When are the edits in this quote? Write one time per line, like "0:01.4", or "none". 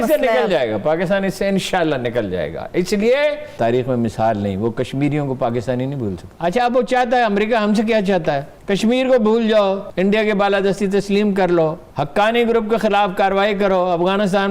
0:03.5
0:06.2
0:08.5
0:09.9
0:11.8